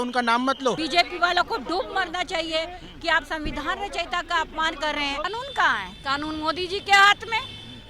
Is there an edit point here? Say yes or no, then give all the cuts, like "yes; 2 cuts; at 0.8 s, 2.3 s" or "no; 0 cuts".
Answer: yes; 2 cuts; at 0.8 s, 5.2 s